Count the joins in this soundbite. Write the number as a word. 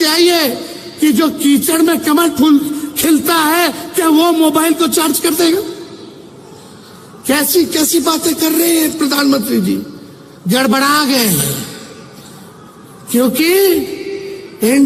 zero